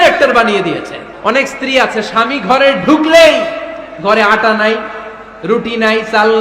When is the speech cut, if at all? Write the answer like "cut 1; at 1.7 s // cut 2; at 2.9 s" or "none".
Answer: cut 1; at 1.0 s